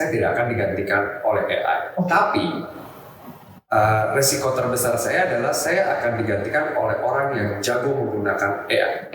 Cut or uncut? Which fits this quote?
uncut